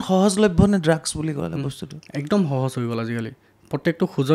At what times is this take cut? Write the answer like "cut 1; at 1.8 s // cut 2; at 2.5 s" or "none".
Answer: none